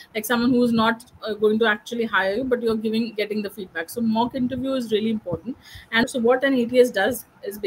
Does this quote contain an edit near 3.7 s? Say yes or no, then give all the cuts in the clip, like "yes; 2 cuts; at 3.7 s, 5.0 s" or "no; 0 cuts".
no; 1 cut; at 6.0 s